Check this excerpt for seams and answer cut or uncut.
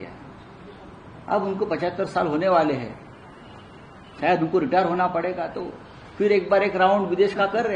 uncut